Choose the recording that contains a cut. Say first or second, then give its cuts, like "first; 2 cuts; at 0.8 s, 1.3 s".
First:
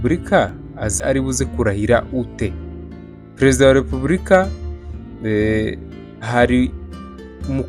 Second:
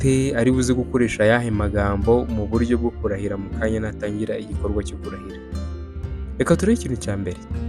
first; 1 cut; at 1.0 s